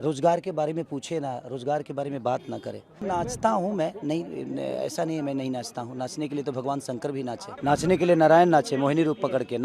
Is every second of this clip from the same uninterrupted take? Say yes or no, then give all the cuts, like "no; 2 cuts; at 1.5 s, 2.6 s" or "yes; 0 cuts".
no; 2 cuts; at 3.0 s, 7.5 s